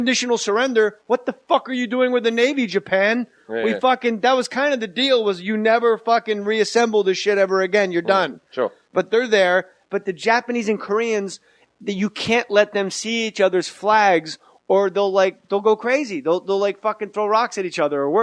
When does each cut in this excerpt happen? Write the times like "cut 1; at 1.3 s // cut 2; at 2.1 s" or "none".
cut 1; at 3.8 s